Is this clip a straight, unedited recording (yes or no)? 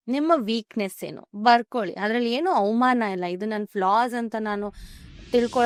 yes